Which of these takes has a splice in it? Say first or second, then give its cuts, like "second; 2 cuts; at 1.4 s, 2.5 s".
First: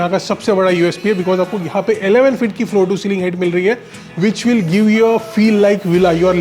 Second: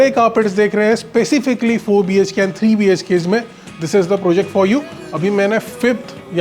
second; 1 cut; at 5.0 s